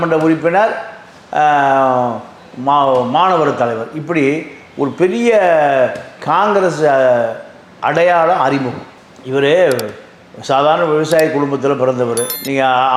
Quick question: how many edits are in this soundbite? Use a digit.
0